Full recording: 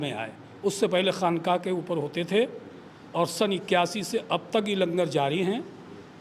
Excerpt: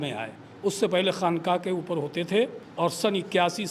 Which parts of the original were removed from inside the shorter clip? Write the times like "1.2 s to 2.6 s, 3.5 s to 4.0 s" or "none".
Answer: 2.6 s to 3.0 s